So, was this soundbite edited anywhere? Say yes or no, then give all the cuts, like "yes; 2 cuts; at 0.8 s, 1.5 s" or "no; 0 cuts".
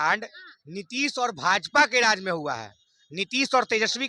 no; 0 cuts